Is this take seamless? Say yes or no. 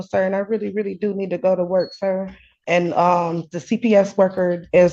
no